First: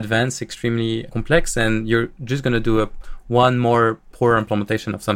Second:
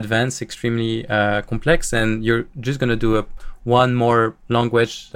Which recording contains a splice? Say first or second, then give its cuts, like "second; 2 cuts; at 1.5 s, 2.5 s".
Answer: first; 2 cuts; at 1.1 s, 4.1 s